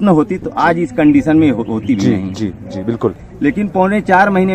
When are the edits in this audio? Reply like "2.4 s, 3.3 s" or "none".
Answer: 3.3 s